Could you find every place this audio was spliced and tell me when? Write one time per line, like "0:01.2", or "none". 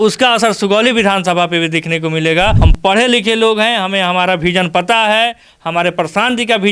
0:02.6